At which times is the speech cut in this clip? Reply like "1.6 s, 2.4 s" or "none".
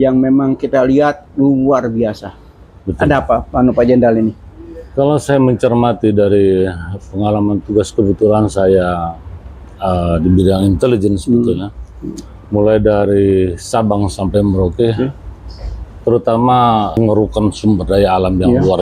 16.9 s